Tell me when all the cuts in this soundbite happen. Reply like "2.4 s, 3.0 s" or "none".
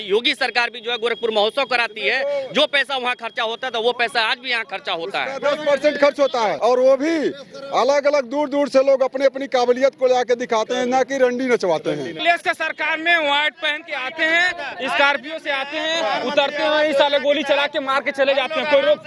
6.6 s, 12.2 s